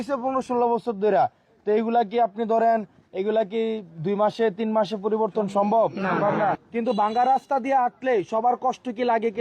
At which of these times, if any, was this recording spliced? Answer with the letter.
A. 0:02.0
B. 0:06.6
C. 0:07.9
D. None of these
B